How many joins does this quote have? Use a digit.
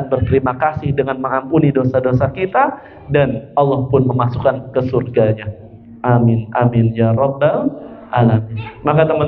0